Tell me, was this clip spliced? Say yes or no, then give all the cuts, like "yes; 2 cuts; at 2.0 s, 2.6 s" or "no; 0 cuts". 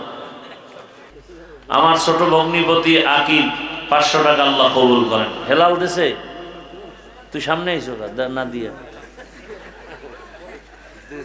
yes; 1 cut; at 1.1 s